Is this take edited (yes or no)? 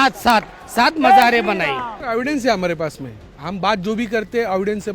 yes